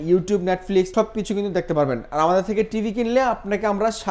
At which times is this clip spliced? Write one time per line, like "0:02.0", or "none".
none